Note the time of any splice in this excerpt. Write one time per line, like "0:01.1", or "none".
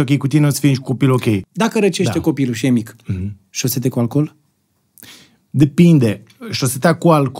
0:01.4